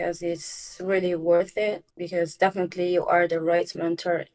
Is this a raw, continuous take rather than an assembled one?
yes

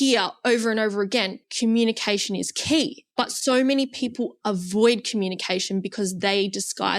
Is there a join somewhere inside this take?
yes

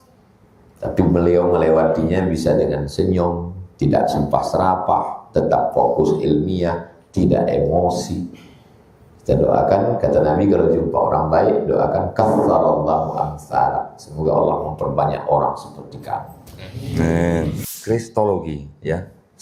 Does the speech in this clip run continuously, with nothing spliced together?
no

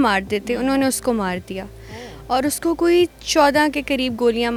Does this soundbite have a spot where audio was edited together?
no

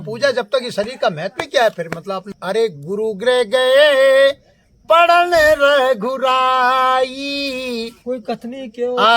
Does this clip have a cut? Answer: yes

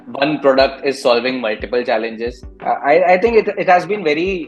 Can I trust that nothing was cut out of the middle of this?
no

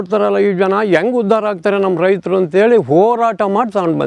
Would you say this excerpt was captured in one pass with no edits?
yes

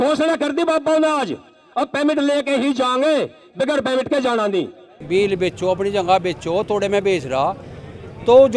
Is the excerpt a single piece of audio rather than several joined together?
no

